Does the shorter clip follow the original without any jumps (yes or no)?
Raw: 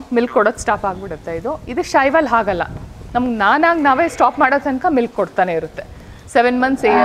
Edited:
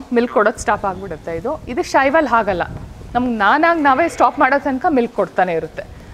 yes